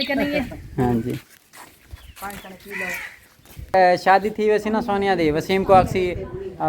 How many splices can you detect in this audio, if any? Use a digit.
1